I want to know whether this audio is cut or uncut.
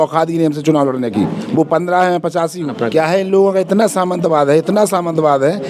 cut